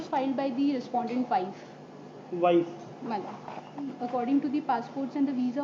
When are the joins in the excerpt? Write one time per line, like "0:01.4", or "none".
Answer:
0:03.9